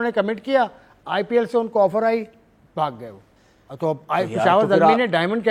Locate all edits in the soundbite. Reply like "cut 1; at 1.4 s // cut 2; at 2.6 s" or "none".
none